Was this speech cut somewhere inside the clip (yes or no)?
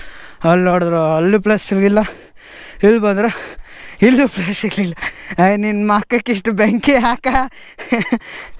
no